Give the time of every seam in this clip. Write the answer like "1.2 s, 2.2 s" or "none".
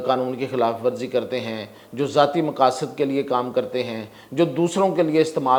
none